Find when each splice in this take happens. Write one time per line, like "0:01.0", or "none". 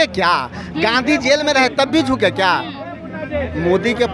none